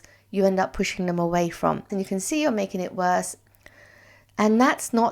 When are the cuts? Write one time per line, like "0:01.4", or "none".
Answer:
0:01.9
0:03.4

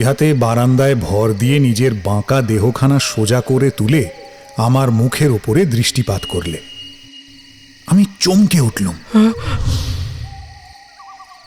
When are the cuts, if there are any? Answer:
none

